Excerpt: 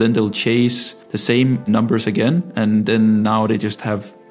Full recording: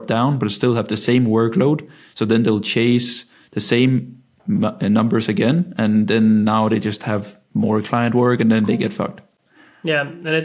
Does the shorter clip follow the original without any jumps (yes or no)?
no